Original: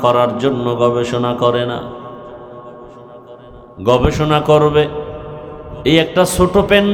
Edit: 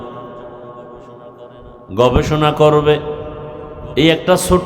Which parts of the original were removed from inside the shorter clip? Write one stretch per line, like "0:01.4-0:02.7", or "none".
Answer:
none